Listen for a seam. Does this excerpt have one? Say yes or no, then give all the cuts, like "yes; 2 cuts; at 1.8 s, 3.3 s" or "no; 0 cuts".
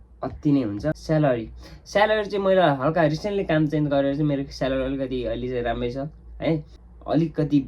yes; 2 cuts; at 1.0 s, 6.8 s